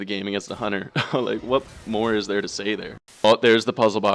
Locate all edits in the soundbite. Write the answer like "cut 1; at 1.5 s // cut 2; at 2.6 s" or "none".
cut 1; at 3.2 s